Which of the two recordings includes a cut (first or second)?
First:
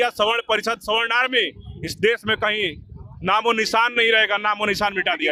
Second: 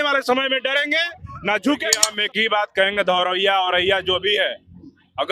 second